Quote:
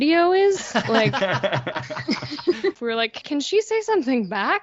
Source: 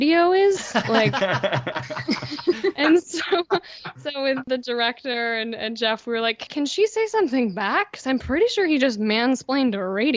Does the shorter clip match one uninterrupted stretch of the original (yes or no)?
no